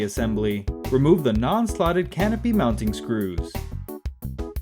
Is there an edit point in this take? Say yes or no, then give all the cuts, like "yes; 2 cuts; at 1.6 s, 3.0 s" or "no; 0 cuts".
no; 0 cuts